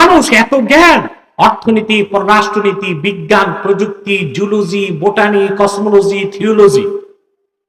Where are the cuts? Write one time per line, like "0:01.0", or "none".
none